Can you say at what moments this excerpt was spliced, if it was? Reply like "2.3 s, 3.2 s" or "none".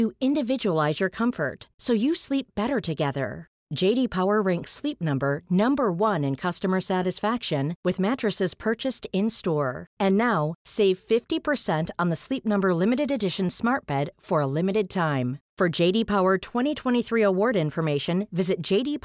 none